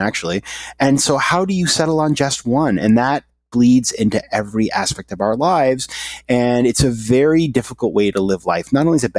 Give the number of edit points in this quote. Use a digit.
0